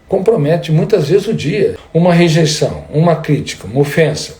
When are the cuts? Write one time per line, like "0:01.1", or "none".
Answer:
0:01.8